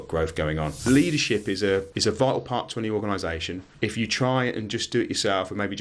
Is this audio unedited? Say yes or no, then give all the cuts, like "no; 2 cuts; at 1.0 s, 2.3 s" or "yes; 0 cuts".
no; 3 cuts; at 0.8 s, 1.9 s, 3.6 s